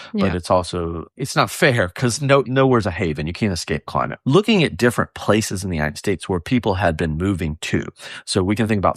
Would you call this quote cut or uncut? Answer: cut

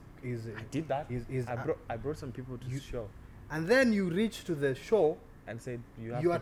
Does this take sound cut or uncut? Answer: uncut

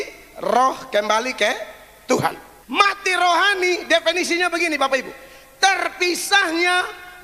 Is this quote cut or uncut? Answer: cut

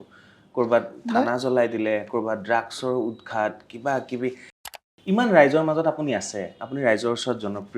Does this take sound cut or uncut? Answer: cut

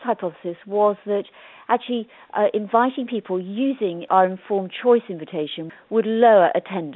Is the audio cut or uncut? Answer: cut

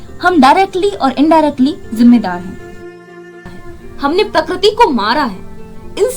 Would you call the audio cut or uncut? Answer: cut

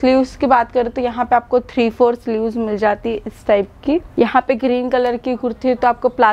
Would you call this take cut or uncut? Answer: cut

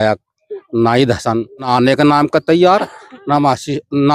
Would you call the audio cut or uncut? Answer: cut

